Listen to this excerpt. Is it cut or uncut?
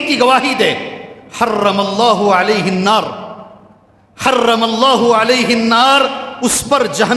uncut